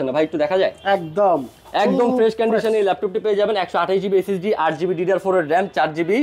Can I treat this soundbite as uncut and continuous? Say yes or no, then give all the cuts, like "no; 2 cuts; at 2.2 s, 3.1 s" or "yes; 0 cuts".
yes; 0 cuts